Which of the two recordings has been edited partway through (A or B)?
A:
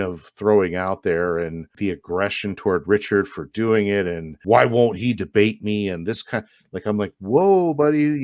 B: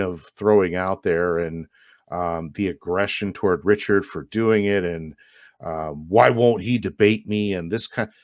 A